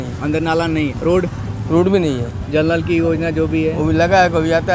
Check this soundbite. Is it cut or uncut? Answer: cut